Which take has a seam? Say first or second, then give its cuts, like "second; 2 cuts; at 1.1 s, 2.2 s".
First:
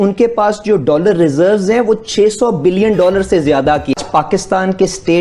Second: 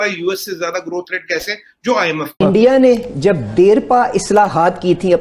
second; 1 cut; at 2.4 s